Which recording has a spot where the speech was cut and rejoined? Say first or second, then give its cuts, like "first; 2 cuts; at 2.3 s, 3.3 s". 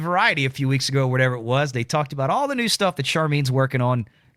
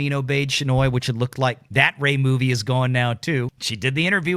second; 2 cuts; at 1.6 s, 3.5 s